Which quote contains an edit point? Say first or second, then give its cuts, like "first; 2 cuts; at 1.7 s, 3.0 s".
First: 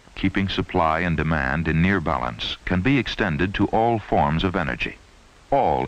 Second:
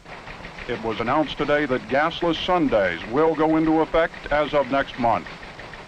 second; 1 cut; at 4.8 s